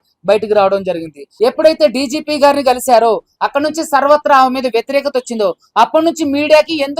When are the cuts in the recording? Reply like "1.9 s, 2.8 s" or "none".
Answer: 1.2 s